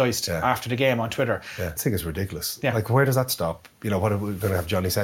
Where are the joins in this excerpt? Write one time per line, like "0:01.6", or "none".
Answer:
0:01.7

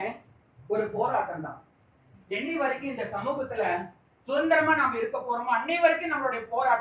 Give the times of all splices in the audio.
none

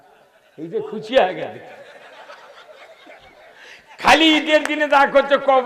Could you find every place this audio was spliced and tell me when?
none

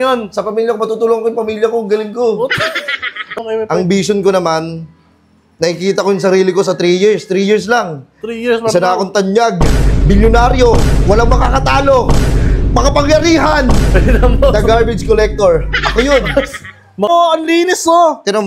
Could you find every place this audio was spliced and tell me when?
0:03.4
0:17.1

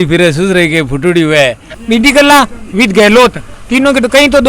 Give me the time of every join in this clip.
0:01.7

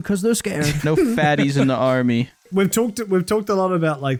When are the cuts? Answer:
none

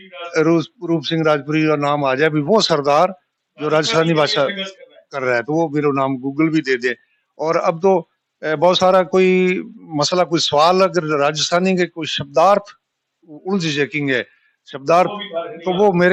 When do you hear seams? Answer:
none

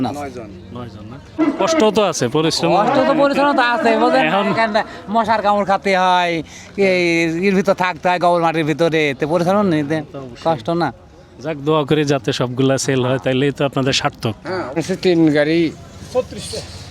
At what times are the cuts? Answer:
0:01.4
0:14.8

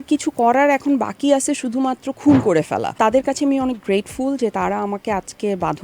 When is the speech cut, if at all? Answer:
0:02.9

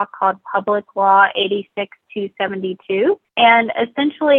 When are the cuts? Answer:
0:03.3

